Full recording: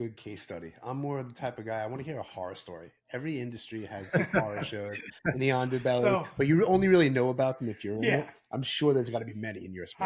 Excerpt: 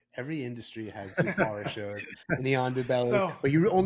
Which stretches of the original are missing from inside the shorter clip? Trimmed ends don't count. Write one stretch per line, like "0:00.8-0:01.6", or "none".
none